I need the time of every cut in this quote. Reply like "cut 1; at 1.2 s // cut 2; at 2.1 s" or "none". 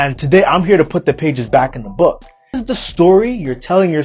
cut 1; at 2.6 s